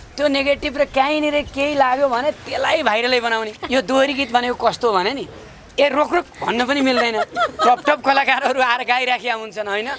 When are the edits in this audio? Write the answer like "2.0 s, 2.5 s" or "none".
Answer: 3.6 s

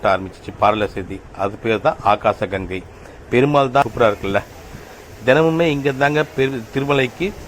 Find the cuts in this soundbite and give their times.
3.8 s

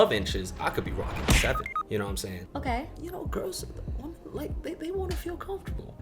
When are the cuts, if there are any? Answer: 3.0 s

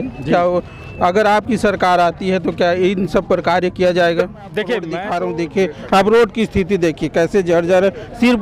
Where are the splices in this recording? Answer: 5.0 s

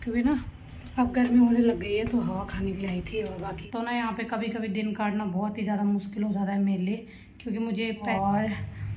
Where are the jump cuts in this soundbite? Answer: 3.6 s, 8.1 s

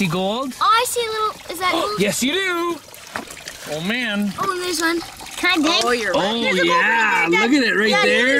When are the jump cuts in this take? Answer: none

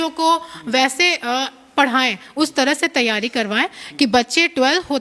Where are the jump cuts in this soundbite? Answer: none

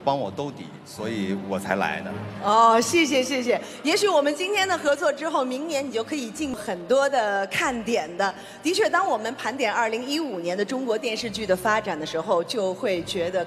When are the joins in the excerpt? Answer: 6.6 s

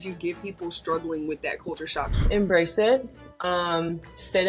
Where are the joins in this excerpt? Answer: 2.2 s

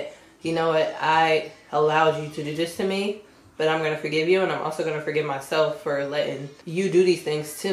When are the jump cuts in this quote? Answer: 6.5 s

